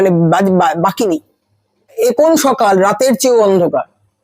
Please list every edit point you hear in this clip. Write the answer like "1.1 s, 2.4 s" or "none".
2.0 s